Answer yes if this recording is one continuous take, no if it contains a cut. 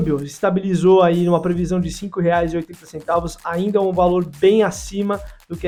yes